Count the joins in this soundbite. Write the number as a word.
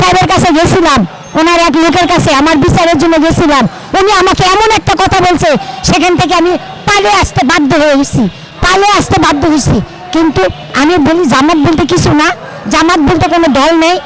zero